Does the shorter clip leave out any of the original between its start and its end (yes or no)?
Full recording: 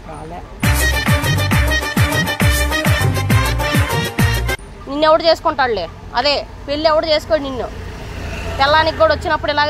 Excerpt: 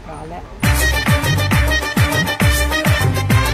no